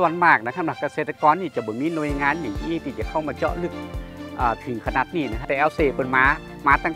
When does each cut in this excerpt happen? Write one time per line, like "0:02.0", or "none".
0:05.4